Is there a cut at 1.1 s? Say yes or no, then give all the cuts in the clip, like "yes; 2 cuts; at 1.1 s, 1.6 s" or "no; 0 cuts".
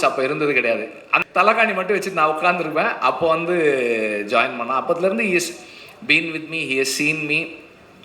yes; 1 cut; at 1.1 s